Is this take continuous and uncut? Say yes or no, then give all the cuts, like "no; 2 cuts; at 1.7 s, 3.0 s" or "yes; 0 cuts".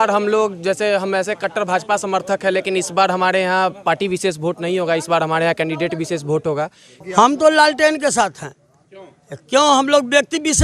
no; 1 cut; at 6.9 s